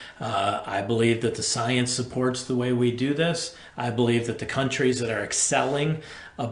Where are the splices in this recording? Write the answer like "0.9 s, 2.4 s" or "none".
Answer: none

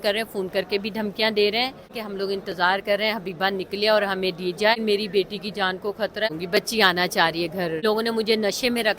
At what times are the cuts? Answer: 1.9 s, 4.8 s, 6.3 s, 7.8 s

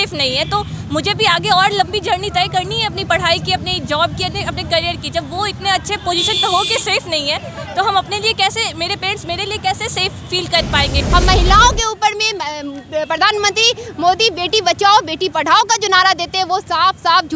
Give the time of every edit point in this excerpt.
11.0 s

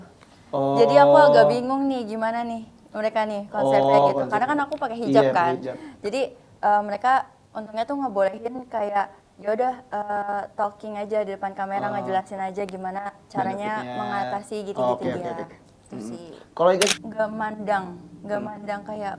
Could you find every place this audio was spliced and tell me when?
16.9 s

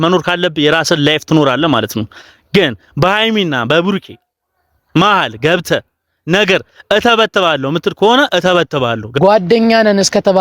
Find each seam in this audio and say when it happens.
9.1 s

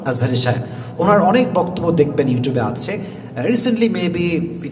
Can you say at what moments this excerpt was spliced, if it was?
none

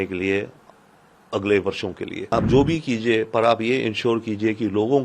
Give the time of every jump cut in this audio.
2.3 s

